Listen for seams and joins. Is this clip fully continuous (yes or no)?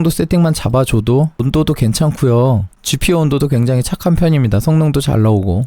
no